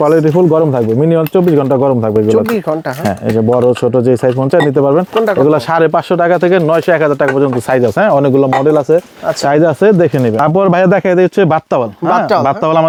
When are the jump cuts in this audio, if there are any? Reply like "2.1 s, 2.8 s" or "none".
none